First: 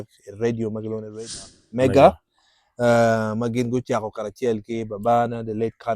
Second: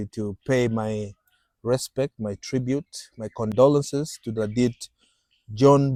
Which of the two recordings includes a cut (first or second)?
first